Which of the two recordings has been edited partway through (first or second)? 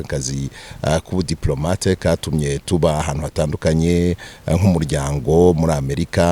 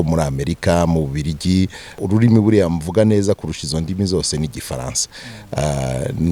second